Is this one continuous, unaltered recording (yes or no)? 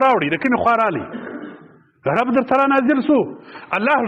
yes